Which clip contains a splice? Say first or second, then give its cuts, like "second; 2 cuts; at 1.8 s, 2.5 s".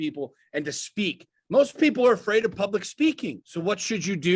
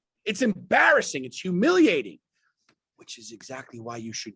first; 1 cut; at 3.4 s